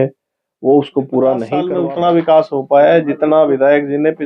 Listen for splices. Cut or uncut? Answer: cut